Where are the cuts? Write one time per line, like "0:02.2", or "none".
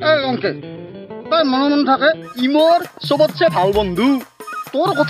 0:02.3